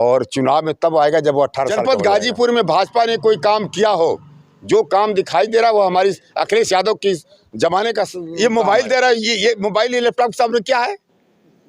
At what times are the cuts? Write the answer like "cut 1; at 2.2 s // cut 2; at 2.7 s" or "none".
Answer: cut 1; at 1.8 s // cut 2; at 8.2 s